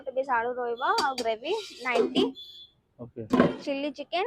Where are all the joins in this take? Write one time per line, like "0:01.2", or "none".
0:03.3

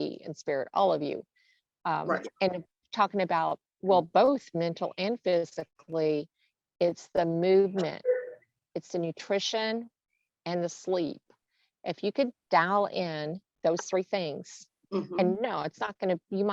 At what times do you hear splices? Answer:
none

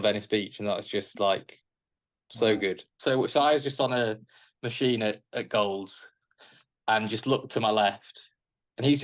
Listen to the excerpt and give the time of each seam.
0:02.9

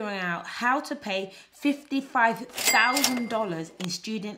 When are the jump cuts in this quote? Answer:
none

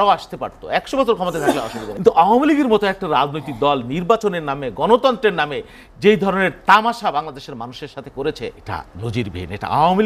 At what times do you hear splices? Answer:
0:01.8
0:08.6

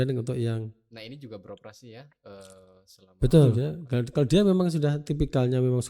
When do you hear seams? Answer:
0:03.7

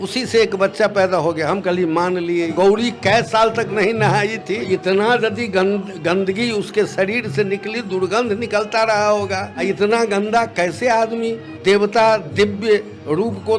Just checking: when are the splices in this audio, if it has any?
0:02.5
0:04.7
0:09.5
0:11.5

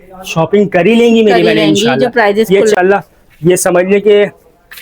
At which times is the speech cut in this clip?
0:02.8

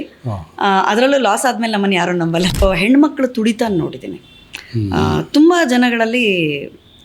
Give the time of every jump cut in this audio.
0:02.6

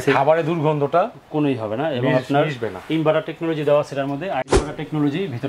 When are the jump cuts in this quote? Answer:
0:04.5

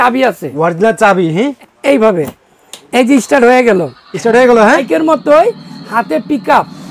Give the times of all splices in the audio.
0:01.6
0:04.8

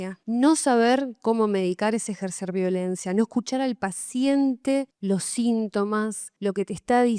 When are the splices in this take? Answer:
none

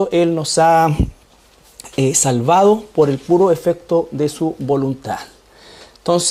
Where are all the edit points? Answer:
none

